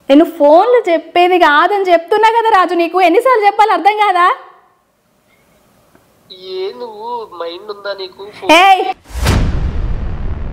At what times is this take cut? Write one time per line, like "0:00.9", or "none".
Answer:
none